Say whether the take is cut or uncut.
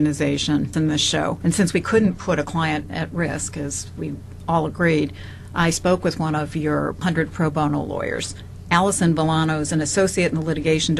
cut